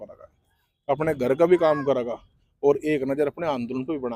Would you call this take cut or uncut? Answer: uncut